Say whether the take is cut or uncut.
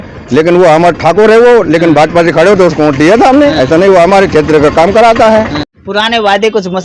cut